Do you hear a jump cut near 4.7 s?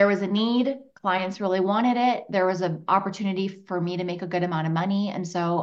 no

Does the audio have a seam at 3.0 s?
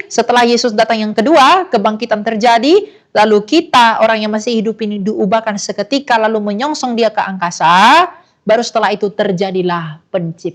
no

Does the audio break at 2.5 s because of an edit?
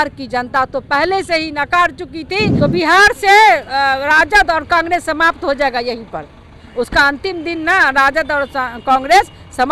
yes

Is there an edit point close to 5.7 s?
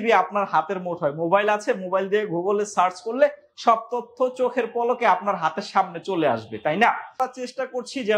no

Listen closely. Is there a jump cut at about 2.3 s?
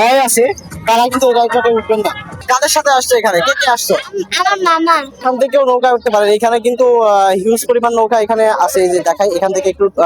yes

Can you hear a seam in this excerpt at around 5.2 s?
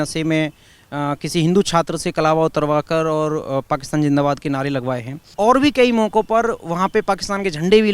yes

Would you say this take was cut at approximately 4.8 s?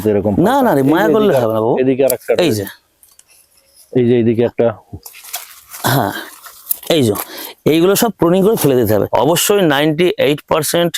no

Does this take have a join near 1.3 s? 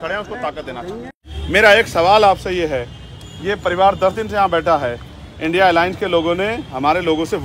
yes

